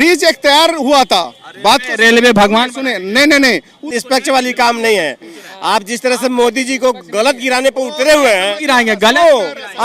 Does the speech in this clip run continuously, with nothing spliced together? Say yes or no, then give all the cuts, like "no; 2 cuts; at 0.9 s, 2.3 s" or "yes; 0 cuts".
no; 1 cut; at 3.9 s